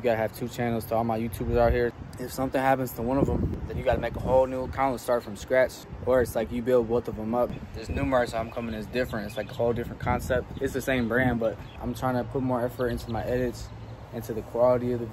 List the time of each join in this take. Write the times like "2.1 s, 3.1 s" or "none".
2.0 s, 3.5 s, 5.9 s, 7.6 s, 11.7 s

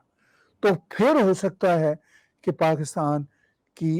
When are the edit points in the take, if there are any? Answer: none

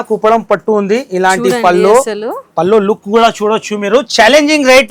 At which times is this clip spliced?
none

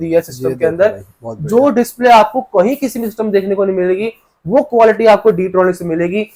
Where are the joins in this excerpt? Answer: none

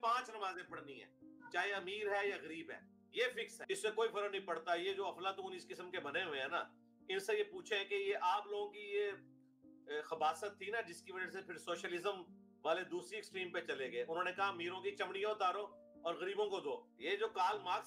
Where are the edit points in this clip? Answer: 3.6 s, 16.9 s

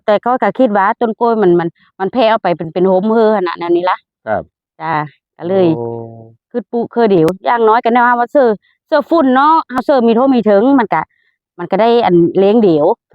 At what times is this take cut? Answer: none

